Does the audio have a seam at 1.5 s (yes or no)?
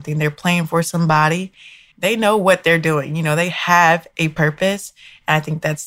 no